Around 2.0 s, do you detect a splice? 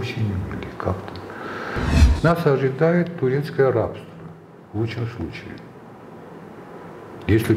yes; 1 cut; at 2.0 s

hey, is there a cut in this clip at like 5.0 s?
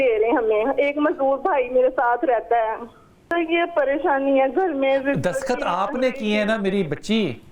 no; 1 cut; at 3.3 s

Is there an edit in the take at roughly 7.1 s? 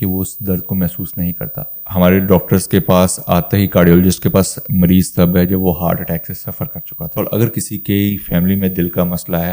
yes; 2 cuts; at 1.8 s, 7.1 s

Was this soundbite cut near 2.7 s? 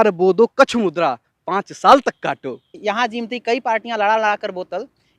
yes; 1 cut; at 2.7 s

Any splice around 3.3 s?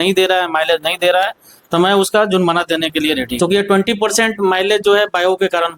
yes; 1 cut; at 3.3 s

